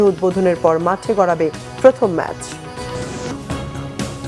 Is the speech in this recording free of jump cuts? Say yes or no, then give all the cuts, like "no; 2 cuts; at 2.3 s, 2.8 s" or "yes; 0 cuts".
no; 1 cut; at 3.3 s